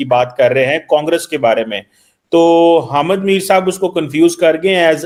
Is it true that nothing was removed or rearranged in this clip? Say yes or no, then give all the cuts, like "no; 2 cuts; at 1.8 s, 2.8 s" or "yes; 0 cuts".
yes; 0 cuts